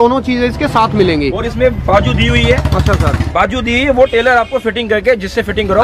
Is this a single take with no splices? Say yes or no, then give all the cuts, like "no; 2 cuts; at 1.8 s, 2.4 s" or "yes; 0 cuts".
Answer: yes; 0 cuts